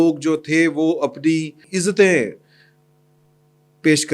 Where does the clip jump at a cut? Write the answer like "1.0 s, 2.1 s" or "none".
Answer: 1.6 s